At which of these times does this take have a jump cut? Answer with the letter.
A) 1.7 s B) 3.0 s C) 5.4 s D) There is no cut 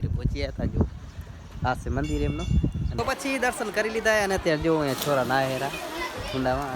B